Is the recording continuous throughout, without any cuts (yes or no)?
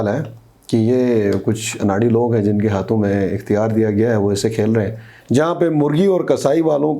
no